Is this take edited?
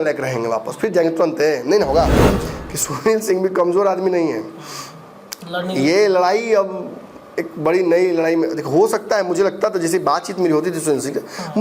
yes; 1 cut; at 2.3 s

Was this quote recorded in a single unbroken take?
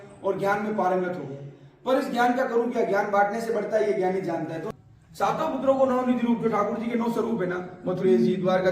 no; 1 cut; at 4.6 s

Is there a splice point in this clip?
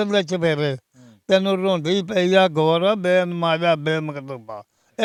no; 0 cuts

